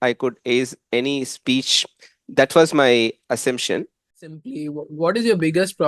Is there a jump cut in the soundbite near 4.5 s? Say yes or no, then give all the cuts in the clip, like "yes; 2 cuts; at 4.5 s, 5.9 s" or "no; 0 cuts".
yes; 1 cut; at 4.5 s